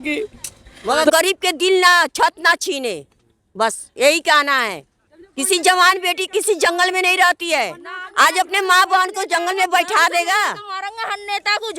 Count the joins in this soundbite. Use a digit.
1